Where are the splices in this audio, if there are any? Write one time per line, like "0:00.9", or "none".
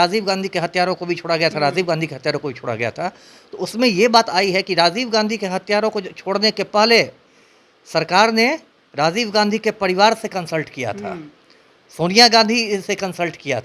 none

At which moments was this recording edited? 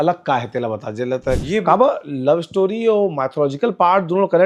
0:01.4

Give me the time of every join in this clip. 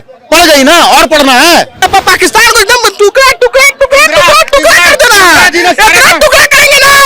0:01.8

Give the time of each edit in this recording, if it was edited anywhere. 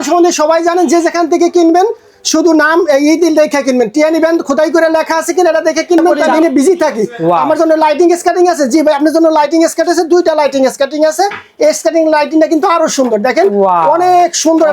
0:06.4

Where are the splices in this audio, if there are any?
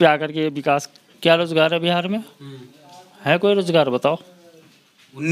0:01.1

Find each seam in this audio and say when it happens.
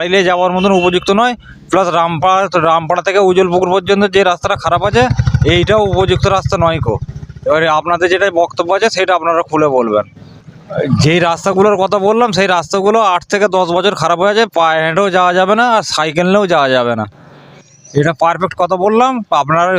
none

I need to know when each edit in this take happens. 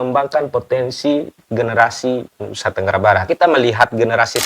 0:03.3

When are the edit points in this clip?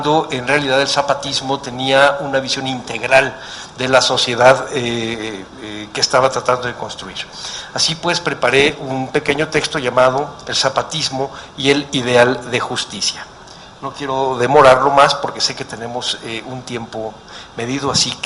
0:15.6

